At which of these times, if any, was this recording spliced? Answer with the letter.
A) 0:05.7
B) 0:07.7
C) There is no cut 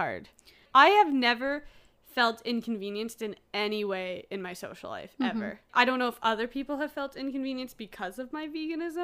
A